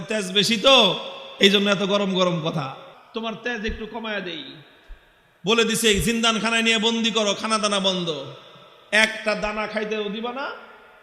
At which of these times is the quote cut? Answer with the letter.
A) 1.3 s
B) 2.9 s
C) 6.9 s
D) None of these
B